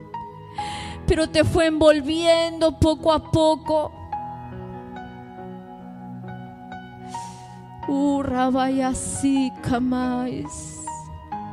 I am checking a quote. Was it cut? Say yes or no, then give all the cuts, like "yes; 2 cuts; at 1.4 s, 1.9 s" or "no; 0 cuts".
no; 0 cuts